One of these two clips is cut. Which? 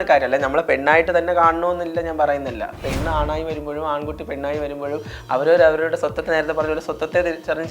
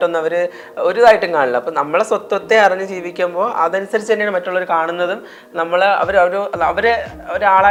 first; 1 cut; at 2.8 s

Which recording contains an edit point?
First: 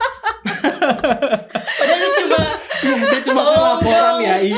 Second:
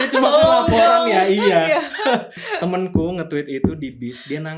second; 1 cut; at 2.4 s

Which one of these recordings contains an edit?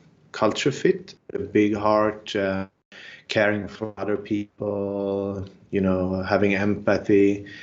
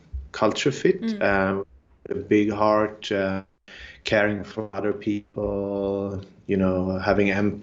first; 1 cut; at 1.0 s

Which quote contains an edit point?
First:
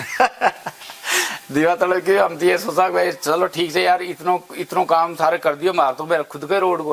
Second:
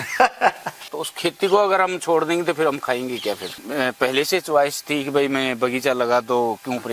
second; 2 cuts; at 1.0 s, 3.6 s

